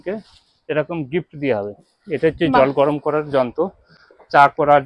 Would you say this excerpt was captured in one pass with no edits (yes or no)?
yes